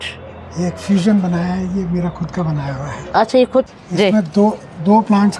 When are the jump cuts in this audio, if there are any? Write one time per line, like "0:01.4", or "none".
0:03.7